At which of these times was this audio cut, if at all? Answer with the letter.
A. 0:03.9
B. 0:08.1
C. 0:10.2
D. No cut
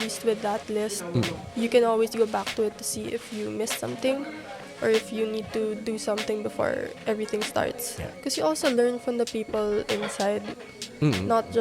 B